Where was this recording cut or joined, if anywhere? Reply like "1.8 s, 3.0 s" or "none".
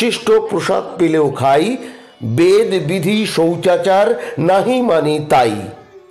none

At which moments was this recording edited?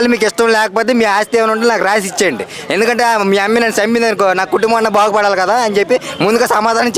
none

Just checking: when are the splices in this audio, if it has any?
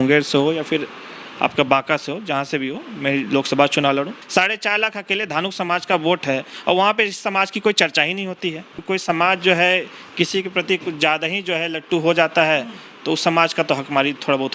4.2 s, 8.7 s

